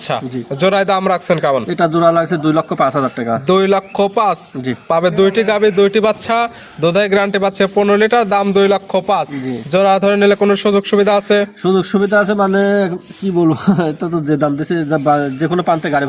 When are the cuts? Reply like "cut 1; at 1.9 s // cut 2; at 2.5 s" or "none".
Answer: none